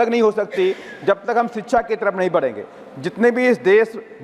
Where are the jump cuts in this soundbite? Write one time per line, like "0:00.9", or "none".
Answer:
none